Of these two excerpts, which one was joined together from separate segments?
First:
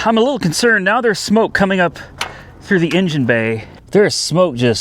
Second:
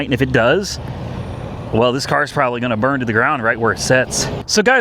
first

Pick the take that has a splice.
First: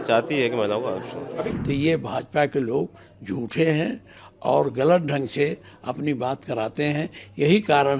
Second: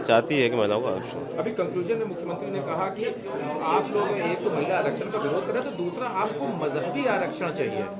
first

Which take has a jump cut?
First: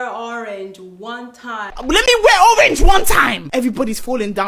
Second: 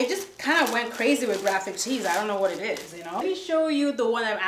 second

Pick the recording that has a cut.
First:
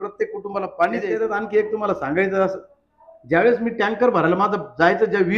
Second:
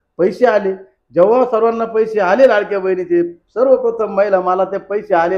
first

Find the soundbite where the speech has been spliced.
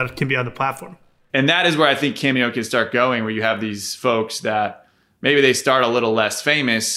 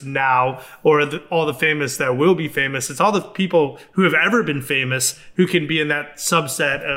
first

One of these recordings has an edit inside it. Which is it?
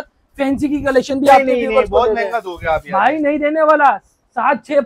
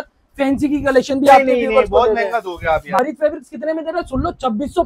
second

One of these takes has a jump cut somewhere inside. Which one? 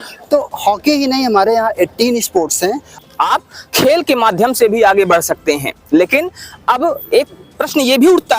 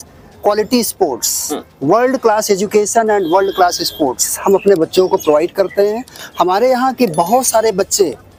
first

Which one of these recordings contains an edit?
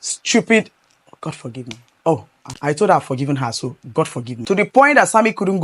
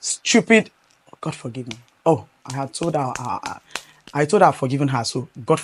first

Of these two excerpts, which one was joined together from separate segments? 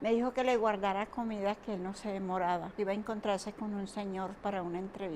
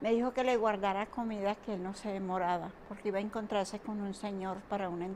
first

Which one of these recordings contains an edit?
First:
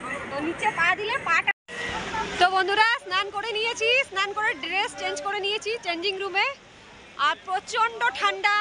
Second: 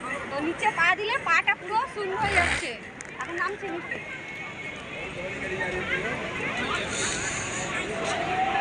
first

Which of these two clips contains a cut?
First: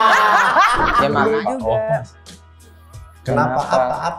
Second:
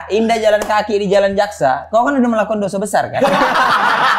first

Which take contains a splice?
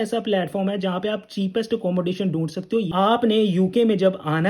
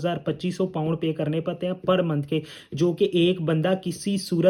first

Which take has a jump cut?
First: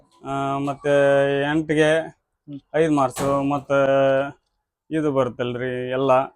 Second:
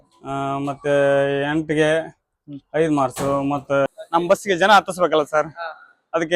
second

